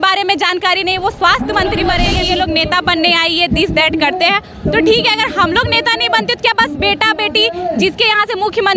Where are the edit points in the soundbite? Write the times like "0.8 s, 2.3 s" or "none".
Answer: 2.1 s